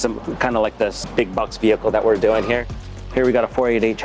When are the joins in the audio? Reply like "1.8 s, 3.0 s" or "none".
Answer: 1.0 s, 2.7 s